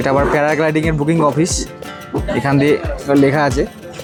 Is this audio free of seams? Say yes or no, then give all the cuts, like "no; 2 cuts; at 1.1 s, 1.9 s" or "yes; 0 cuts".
yes; 0 cuts